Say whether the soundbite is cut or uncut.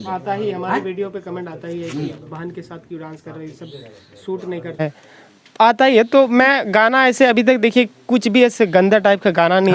uncut